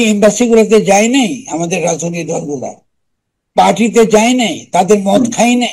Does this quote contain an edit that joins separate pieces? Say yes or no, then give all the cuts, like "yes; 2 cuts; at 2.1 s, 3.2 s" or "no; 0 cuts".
no; 0 cuts